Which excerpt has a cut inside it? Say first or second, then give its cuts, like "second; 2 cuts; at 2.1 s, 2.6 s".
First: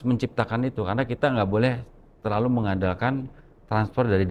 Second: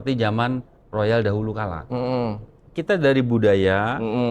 second; 1 cut; at 2.8 s